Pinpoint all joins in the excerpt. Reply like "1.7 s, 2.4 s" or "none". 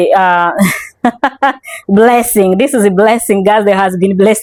none